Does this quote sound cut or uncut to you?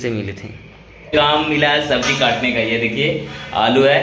cut